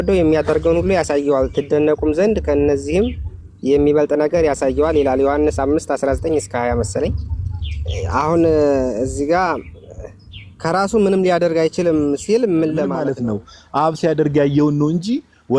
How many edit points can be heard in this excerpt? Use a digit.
1